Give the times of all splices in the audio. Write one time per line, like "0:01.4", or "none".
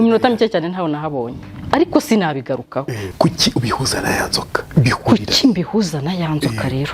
0:03.0